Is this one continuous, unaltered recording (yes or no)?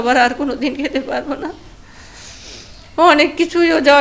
yes